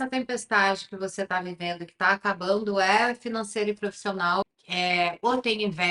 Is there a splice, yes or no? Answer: yes